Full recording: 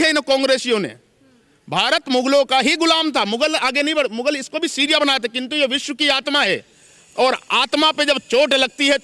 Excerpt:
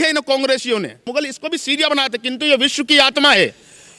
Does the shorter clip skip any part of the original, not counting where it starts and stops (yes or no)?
yes